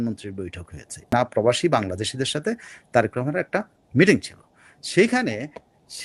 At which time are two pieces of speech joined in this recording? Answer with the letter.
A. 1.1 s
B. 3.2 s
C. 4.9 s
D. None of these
A